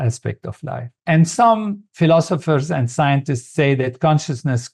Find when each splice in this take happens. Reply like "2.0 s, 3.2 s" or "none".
none